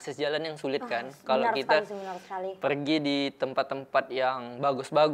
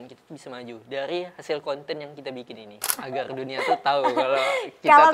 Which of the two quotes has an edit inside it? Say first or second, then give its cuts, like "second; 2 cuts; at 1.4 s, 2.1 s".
second; 1 cut; at 3.0 s